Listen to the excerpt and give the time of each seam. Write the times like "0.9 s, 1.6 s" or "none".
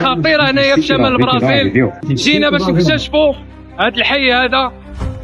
2.1 s

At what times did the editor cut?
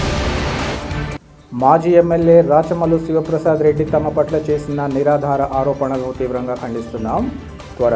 1.0 s

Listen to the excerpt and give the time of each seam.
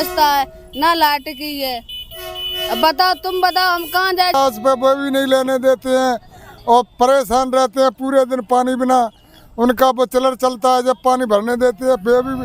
4.3 s

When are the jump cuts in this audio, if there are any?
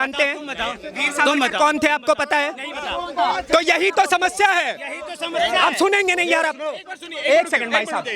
none

